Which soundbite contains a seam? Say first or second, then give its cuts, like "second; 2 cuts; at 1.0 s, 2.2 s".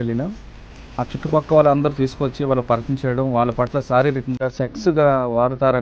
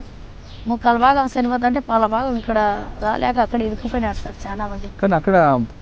second; 1 cut; at 4.8 s